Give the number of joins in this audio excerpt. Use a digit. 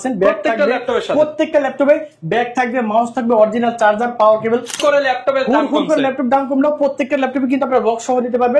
1